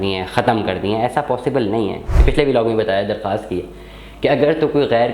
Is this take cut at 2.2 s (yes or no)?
yes